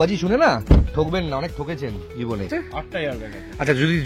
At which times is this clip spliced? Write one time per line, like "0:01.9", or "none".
0:02.6